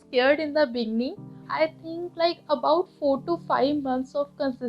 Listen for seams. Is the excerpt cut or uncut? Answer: cut